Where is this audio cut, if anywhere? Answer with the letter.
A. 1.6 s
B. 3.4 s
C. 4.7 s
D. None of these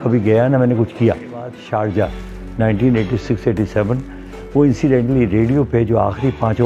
A